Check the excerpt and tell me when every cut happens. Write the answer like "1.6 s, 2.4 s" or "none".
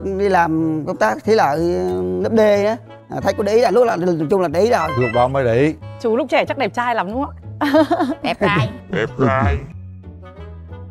2.9 s, 5.8 s